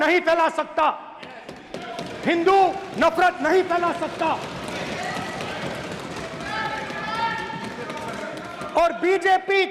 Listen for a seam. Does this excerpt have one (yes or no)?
no